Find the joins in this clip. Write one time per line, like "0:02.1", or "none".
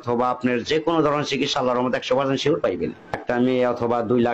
0:02.6